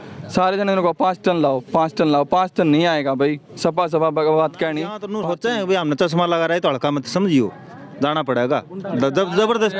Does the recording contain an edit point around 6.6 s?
no; 1 cut; at 5.0 s

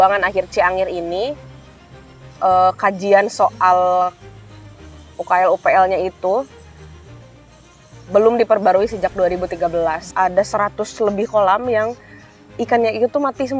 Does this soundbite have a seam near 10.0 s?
yes; 1 cut; at 10.0 s

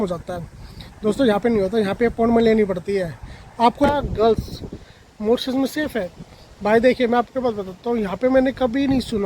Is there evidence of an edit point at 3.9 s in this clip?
yes; 1 cut; at 3.9 s

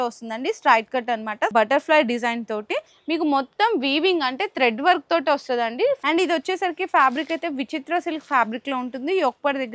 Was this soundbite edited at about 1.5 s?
yes; 2 cuts; at 1.5 s, 6.0 s

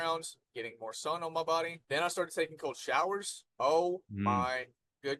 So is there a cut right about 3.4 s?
yes; 2 cuts; at 1.8 s, 3.4 s

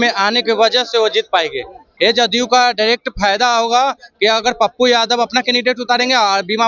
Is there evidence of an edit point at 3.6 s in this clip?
no; 1 cut; at 1.8 s

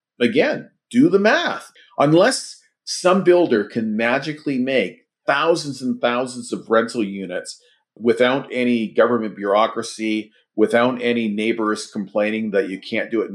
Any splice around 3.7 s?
no; 2 cuts; at 1.7 s, 7.9 s

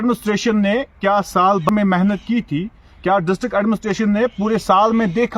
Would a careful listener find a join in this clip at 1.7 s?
yes; 1 cut; at 1.7 s

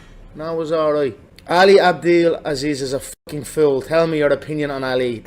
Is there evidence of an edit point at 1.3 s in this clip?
yes; 1 cut; at 1.3 s

